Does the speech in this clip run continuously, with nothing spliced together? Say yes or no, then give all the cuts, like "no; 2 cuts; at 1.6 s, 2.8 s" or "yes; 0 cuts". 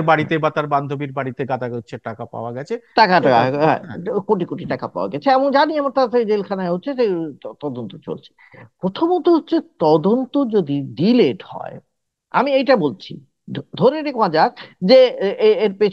yes; 0 cuts